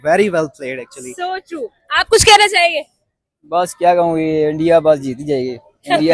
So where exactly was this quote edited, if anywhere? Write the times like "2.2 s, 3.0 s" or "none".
none